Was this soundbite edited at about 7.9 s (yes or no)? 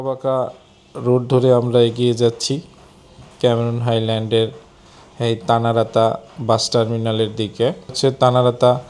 yes